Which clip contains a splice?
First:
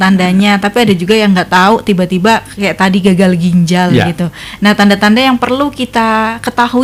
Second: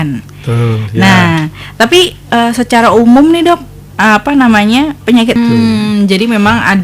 second; 1 cut; at 5.4 s

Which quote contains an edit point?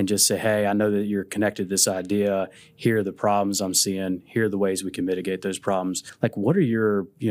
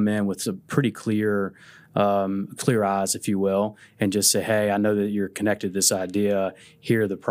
first; 1 cut; at 6.1 s

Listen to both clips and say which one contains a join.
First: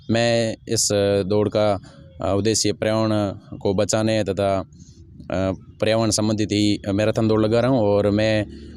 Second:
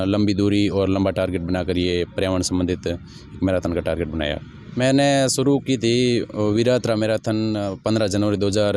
second; 1 cut; at 4.6 s

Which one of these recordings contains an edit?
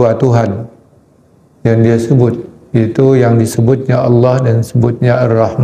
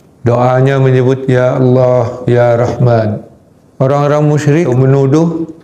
second; 1 cut; at 4.7 s

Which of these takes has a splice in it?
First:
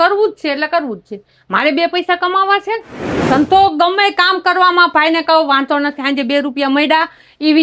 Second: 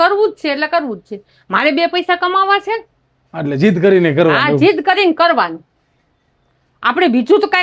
first; 1 cut; at 3.1 s

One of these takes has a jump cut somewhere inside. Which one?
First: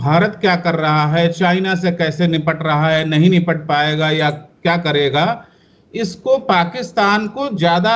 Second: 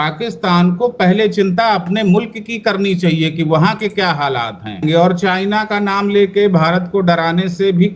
second; 1 cut; at 4.7 s

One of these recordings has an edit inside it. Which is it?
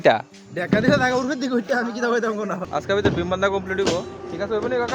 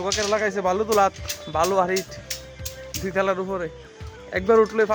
first; 1 cut; at 2.6 s

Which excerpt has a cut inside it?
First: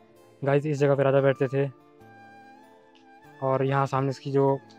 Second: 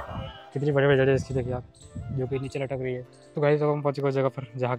second; 1 cut; at 3.2 s

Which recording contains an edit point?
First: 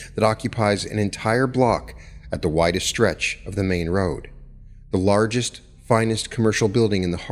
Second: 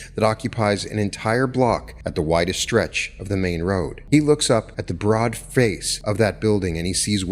second; 4 cuts; at 2.0 s, 4.0 s, 4.8 s, 5.9 s

